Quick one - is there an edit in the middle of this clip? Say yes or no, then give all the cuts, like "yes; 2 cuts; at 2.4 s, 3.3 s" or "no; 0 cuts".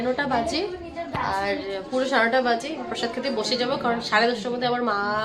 no; 0 cuts